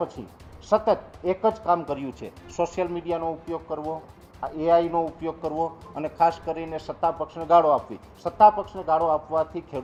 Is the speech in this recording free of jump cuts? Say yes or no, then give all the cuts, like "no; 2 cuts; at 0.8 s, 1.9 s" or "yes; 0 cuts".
yes; 0 cuts